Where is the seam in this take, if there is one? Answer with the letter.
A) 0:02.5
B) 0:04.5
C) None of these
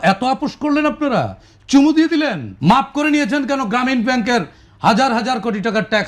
A